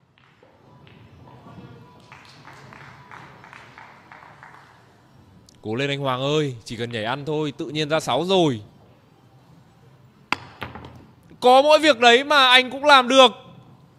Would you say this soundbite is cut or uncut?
uncut